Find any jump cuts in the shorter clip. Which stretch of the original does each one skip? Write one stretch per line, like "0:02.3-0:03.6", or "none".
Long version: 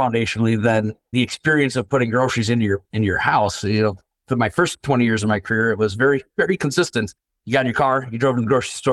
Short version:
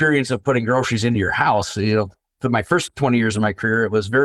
0:02.6-0:03.0